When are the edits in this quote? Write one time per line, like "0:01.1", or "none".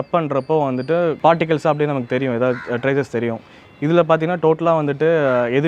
0:01.2